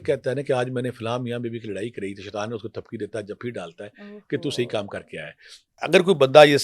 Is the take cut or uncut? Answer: cut